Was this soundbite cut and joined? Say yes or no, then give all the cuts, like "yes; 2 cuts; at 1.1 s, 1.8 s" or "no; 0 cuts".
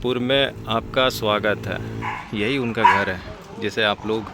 yes; 1 cut; at 2.2 s